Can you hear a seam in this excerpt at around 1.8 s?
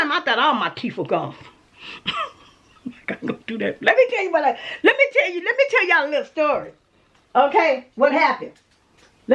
no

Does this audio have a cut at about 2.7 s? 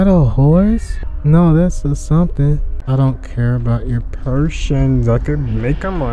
yes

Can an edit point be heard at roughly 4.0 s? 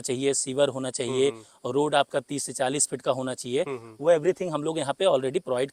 no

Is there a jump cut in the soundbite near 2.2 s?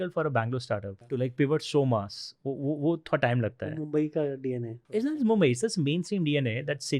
no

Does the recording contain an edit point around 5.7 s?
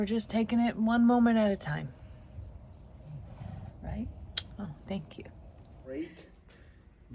yes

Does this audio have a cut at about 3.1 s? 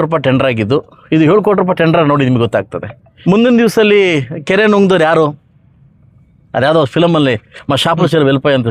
yes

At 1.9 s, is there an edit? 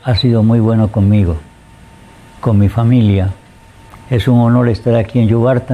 no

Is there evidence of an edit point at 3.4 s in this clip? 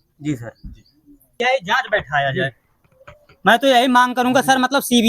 no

